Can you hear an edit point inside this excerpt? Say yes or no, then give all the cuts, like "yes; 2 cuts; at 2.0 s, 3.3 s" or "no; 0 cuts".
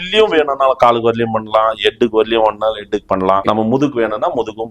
yes; 1 cut; at 3.4 s